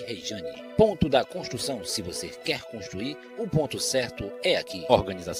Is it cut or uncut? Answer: uncut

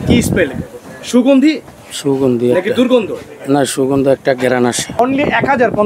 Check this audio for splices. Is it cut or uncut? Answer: cut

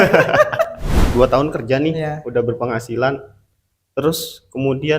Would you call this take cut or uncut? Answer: cut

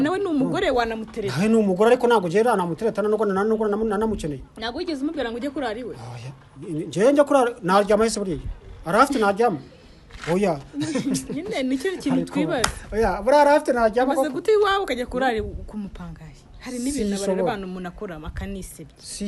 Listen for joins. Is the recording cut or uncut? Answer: uncut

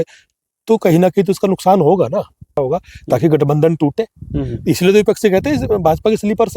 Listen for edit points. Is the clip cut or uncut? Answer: cut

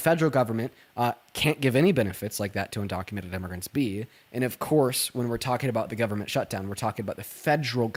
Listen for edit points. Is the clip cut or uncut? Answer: uncut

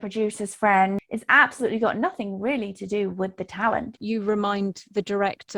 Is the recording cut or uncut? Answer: cut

